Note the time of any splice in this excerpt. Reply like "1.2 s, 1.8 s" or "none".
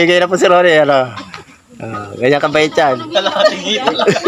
none